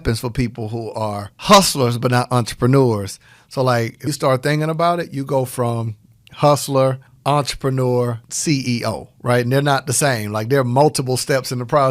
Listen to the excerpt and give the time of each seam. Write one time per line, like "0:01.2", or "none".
0:01.3
0:04.1
0:07.1
0:08.3